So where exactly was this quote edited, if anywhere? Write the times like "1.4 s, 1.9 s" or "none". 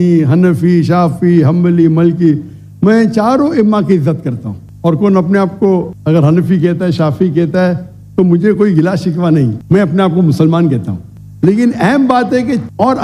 none